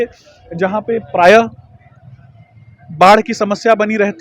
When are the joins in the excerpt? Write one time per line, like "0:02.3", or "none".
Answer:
none